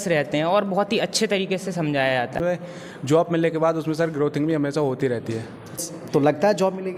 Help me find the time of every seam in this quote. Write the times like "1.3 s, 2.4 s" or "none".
2.4 s, 6.0 s